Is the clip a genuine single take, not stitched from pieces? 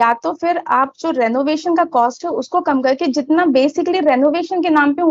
yes; 0 cuts

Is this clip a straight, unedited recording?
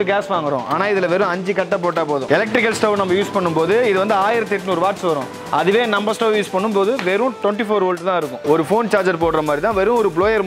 yes; 0 cuts

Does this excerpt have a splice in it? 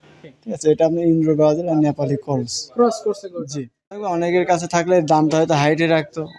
yes; 1 cut; at 4.1 s

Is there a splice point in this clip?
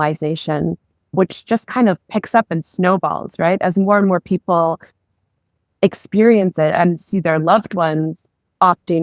yes; 1 cut; at 1.1 s

